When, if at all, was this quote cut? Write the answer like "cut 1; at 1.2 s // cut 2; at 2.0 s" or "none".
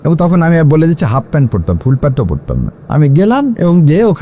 cut 1; at 2.8 s